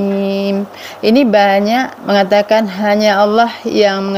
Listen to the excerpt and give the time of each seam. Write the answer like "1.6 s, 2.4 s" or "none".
1.9 s